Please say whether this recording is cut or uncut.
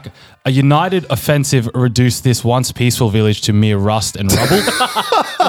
uncut